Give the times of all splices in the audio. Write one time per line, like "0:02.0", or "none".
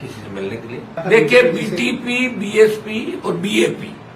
0:00.9

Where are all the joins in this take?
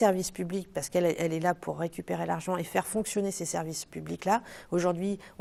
none

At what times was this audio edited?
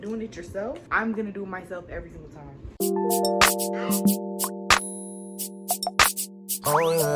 0:00.8
0:02.7

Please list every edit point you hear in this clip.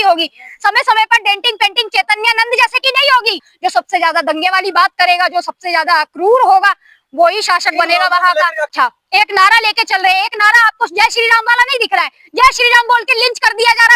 0:03.5
0:08.7

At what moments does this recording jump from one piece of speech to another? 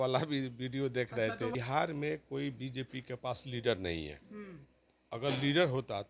0:01.5

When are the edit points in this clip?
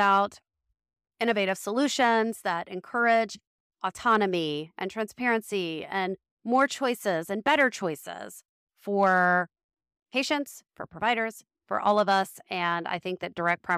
none

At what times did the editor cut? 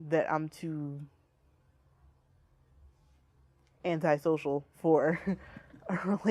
0:04.4

